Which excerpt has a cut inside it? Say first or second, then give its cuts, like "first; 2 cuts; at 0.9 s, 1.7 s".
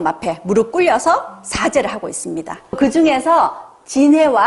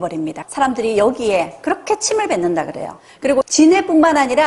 second; 1 cut; at 3.0 s